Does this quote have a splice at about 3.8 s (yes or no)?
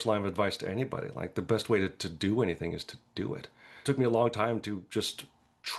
yes